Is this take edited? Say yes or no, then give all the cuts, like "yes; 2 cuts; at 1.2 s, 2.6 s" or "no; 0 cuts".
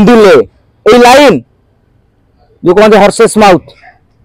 no; 0 cuts